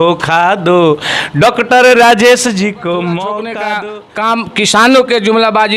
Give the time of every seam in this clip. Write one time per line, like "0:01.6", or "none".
0:03.7